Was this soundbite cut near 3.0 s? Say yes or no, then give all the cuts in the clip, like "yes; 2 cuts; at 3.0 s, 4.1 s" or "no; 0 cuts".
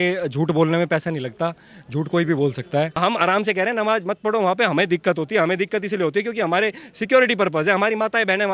yes; 1 cut; at 3.0 s